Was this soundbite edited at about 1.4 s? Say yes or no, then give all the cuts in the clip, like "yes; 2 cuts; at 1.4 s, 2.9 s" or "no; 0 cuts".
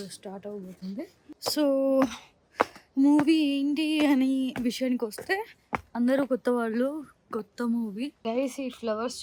yes; 2 cuts; at 1.4 s, 8.2 s